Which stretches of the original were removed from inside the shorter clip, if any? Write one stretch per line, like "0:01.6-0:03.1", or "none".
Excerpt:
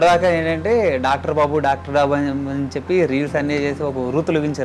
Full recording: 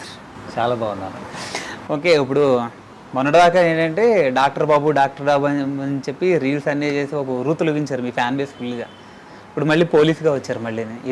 none